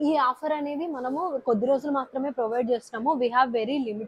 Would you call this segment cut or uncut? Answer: uncut